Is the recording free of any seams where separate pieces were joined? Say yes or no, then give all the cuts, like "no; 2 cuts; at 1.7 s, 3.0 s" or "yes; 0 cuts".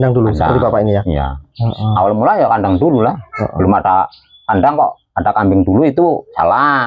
yes; 0 cuts